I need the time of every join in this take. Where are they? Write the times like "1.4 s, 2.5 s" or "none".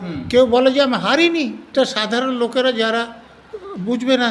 1.7 s